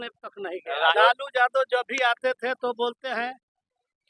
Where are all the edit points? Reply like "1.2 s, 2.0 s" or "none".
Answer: 0.9 s